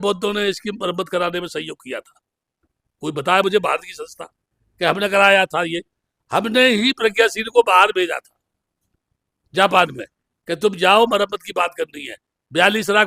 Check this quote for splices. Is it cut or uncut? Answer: uncut